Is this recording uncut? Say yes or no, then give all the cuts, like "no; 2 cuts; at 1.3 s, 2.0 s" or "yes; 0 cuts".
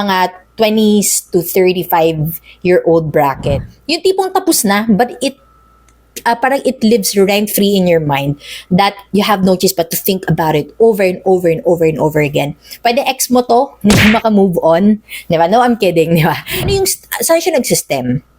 no; 2 cuts; at 3.6 s, 16.5 s